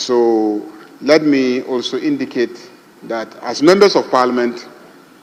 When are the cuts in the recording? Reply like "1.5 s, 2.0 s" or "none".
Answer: none